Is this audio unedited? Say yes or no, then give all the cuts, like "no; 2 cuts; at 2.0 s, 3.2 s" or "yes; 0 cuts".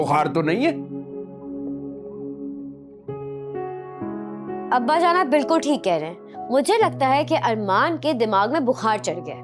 yes; 0 cuts